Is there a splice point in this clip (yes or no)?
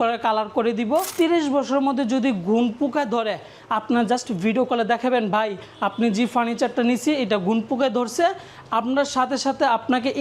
yes